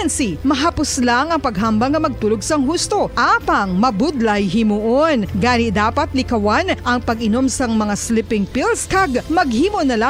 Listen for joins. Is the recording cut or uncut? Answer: uncut